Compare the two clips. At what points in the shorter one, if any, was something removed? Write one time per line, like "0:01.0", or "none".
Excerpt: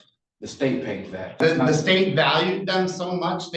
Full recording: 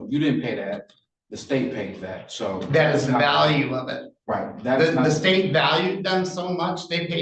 0:01.4